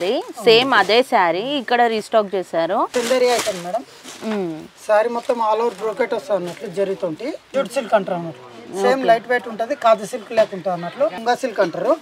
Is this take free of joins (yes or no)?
no